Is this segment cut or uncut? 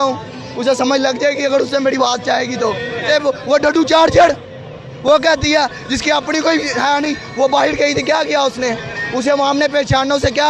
cut